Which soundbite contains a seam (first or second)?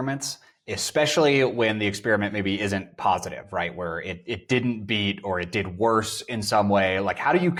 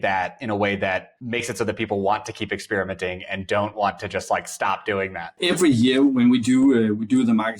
second